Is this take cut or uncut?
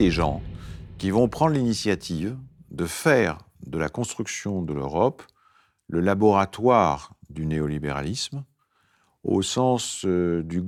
uncut